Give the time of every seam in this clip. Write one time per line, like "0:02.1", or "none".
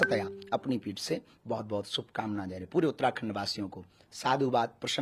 none